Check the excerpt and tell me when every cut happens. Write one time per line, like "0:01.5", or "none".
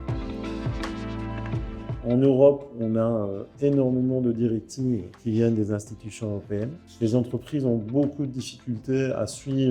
none